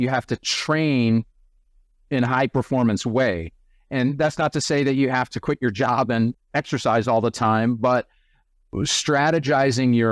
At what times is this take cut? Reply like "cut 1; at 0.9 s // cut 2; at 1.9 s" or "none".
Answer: cut 1; at 6.3 s // cut 2; at 8.7 s